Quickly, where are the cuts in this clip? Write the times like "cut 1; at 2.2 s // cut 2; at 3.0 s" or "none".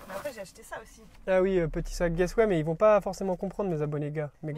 none